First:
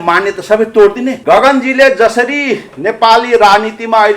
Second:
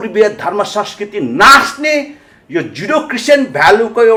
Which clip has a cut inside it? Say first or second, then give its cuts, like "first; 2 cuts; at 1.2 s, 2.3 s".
first; 1 cut; at 1.2 s